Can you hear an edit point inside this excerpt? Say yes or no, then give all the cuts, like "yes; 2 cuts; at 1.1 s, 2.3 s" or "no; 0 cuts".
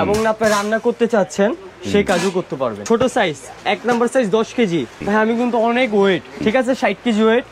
yes; 3 cuts; at 2.8 s, 5.0 s, 6.4 s